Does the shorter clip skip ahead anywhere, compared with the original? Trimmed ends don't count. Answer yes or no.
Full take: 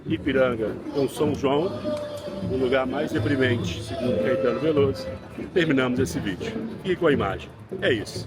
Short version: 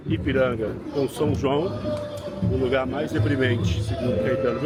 no